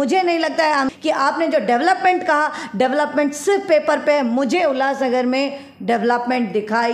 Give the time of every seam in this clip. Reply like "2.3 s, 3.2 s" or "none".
0.9 s